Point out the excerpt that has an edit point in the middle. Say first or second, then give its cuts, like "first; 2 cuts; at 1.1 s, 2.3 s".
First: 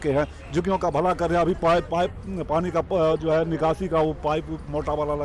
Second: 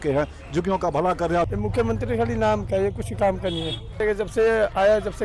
second; 2 cuts; at 1.5 s, 4.0 s